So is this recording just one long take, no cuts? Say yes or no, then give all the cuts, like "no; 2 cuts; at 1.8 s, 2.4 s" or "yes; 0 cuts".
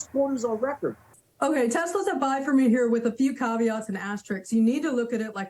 no; 1 cut; at 1.0 s